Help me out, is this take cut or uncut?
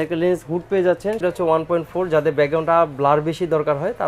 cut